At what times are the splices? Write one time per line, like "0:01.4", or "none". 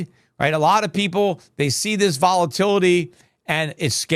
none